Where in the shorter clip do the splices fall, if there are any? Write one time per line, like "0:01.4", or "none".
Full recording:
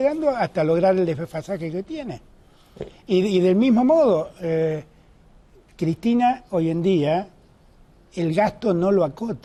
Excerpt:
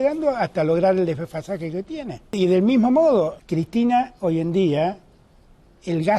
0:02.4
0:03.4